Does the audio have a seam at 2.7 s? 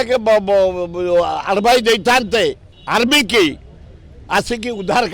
yes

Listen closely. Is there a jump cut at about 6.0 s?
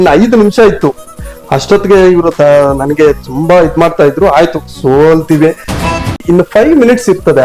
yes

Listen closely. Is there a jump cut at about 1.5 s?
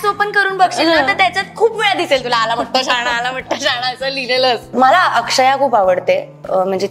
no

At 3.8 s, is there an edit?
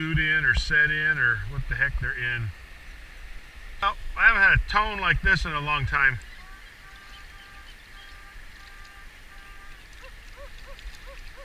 yes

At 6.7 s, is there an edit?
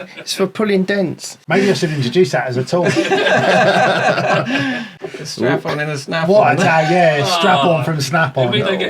no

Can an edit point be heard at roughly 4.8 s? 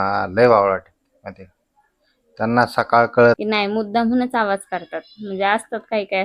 no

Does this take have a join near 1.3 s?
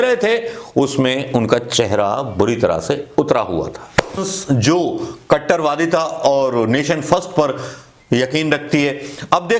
no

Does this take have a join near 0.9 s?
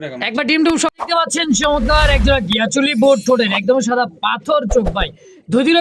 yes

